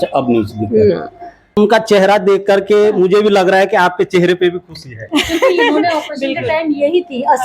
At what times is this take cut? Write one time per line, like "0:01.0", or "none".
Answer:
0:01.6